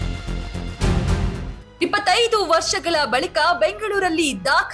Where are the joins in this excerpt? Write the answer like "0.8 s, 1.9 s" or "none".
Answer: 1.4 s